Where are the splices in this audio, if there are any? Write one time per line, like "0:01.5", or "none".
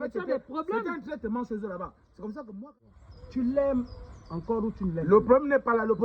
0:02.7